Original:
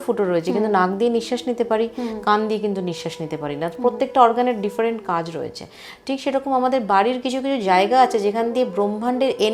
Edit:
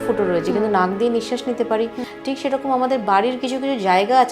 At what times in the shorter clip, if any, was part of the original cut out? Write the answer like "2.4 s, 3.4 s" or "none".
2.1 s